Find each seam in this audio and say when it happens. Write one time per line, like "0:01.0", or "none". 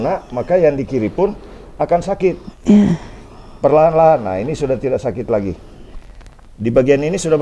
none

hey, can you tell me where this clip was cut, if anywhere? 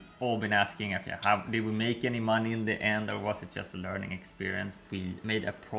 0:04.8

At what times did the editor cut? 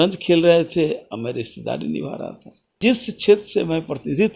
0:02.8

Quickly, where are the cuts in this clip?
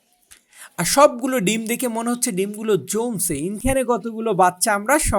0:03.6

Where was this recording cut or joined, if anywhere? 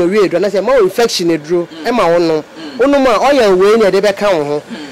none

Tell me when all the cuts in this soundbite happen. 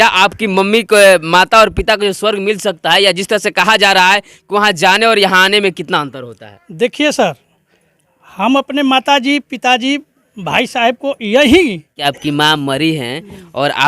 0:12.0

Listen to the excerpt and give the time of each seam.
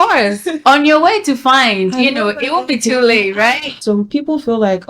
0:03.7

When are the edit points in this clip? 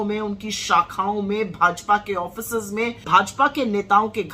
0:03.0

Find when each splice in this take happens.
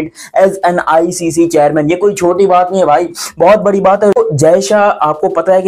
none

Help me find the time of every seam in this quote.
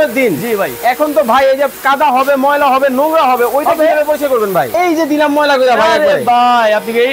0:04.7

